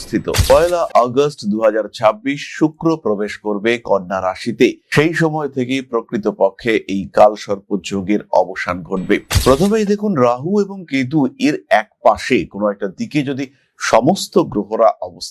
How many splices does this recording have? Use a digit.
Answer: 1